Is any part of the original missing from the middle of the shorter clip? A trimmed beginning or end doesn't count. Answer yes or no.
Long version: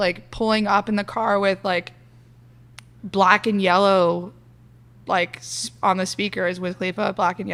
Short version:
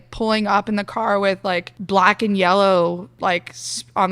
yes